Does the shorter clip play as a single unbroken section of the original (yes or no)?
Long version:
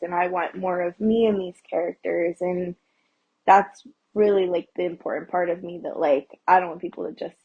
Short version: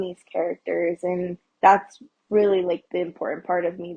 no